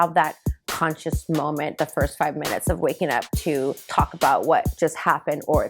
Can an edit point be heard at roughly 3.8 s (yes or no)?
yes